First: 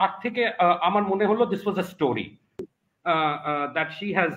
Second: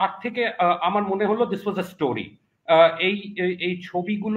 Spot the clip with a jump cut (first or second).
first